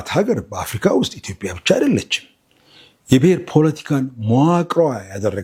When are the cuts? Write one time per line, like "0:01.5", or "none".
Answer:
none

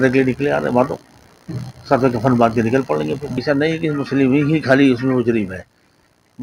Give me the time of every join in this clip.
none

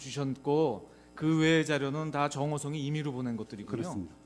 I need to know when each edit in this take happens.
0:01.0

